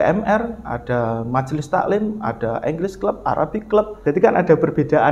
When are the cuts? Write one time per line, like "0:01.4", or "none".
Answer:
0:04.0